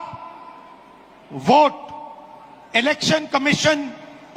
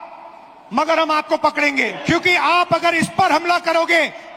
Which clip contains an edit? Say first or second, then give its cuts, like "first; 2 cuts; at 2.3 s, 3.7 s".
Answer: second; 1 cut; at 2.0 s